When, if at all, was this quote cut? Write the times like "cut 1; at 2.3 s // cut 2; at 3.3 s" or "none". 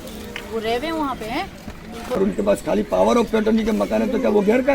cut 1; at 2.2 s